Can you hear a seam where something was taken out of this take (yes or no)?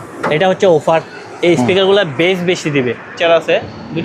yes